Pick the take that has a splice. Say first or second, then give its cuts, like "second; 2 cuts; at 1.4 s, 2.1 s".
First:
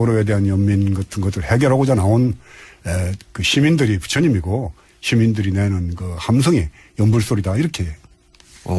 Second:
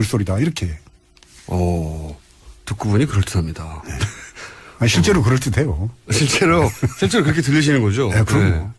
first; 1 cut; at 2.4 s